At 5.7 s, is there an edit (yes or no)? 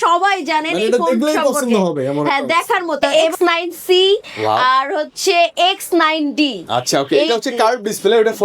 no